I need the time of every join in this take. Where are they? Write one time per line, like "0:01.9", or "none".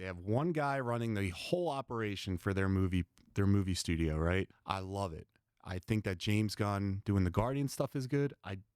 0:04.6